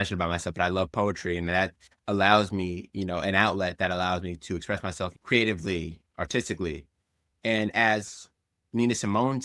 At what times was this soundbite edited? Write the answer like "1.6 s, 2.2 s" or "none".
none